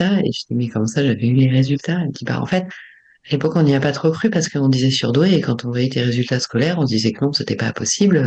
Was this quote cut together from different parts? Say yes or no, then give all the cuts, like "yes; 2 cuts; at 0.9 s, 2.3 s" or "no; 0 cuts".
no; 0 cuts